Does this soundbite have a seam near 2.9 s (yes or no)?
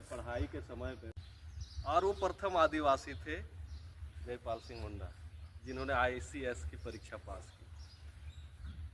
no